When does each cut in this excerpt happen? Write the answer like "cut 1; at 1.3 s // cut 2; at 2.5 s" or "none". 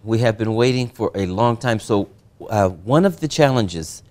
none